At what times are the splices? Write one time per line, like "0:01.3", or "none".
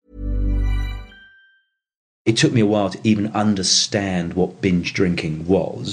0:02.2